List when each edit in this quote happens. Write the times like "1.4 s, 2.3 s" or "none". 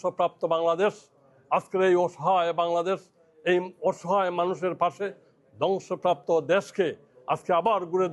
none